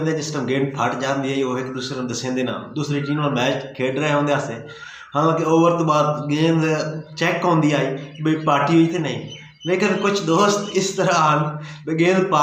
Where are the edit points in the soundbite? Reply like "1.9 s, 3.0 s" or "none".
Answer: none